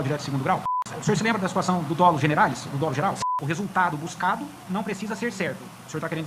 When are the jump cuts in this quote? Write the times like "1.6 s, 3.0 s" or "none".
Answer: 0.9 s, 3.2 s